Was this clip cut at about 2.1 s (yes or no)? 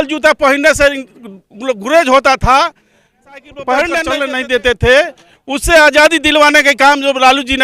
no